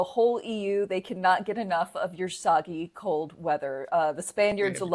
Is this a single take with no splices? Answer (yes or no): yes